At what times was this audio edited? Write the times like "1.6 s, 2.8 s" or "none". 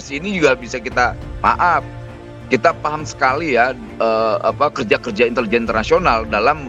none